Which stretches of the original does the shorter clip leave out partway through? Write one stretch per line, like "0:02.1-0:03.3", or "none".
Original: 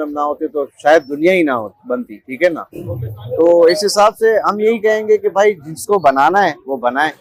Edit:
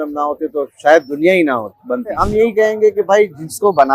0:02.2-0:04.5